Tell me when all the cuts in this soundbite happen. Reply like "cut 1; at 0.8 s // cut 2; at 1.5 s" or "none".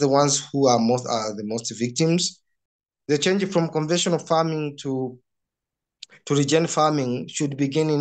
cut 1; at 2.6 s